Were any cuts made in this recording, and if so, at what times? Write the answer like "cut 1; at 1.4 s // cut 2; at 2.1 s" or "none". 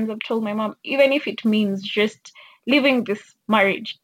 none